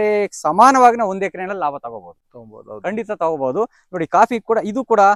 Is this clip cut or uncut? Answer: uncut